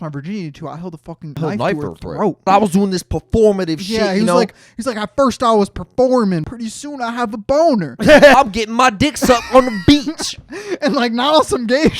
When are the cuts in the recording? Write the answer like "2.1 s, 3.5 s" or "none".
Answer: 1.4 s, 2.5 s, 6.5 s, 8.4 s

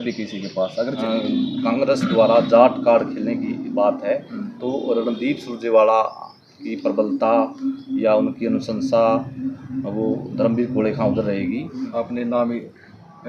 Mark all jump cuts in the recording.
0.9 s, 11.8 s

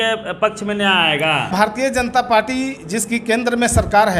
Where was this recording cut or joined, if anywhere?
1.5 s

